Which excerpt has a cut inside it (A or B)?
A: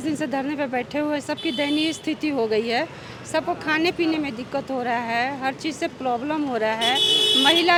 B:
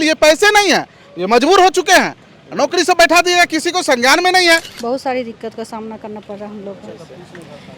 B